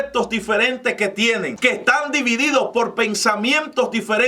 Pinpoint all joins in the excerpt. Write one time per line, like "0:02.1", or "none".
0:01.5

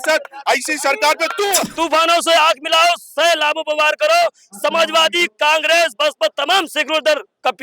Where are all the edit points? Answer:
0:01.6

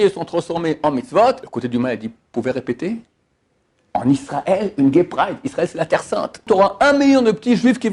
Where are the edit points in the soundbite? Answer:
0:01.4
0:06.4

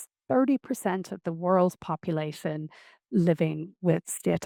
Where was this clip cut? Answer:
none

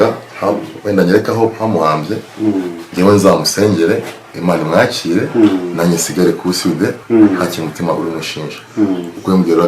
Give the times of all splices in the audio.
0:07.0

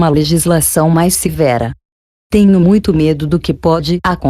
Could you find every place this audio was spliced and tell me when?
0:02.3

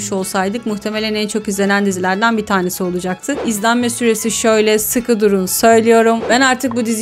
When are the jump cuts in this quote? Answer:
0:03.4
0:06.2

